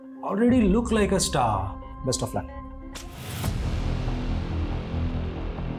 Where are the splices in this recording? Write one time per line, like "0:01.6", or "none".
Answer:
0:03.1